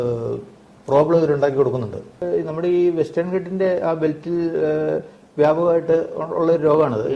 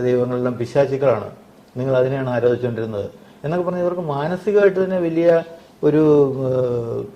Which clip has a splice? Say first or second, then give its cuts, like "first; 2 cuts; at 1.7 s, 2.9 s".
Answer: first; 1 cut; at 2.2 s